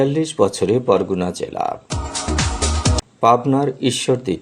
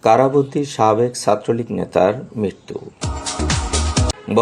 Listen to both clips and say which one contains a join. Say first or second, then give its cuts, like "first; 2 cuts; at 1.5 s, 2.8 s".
second; 1 cut; at 2.9 s